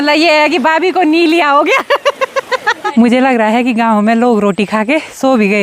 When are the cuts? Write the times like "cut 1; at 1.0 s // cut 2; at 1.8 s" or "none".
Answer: cut 1; at 2.8 s